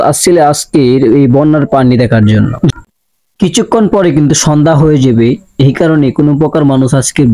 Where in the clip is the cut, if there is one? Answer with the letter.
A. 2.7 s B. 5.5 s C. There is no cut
A